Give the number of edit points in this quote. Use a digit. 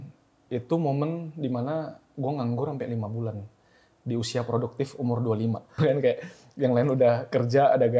1